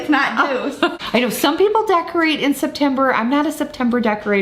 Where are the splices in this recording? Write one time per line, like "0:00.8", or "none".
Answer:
0:01.0